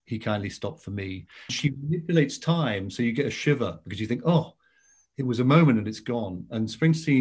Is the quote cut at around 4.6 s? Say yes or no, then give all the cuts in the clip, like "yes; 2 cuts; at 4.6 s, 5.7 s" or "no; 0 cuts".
no; 1 cut; at 1.5 s